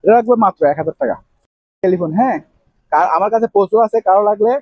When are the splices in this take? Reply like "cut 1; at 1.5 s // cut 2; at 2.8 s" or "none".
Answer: none